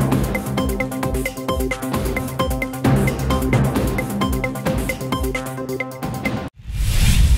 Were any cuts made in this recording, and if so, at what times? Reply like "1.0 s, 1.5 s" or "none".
6.5 s